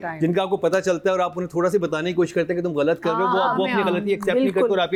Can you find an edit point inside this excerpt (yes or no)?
no